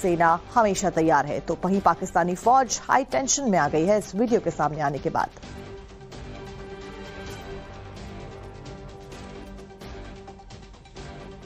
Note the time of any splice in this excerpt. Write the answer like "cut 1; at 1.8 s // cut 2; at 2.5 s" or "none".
cut 1; at 7.1 s